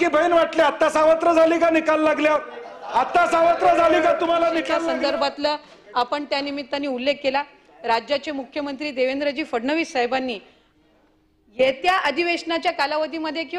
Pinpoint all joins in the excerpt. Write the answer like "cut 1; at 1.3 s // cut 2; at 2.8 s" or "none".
cut 1; at 4.9 s